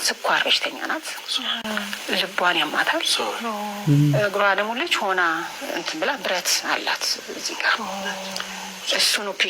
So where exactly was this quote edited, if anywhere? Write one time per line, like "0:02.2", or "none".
0:01.6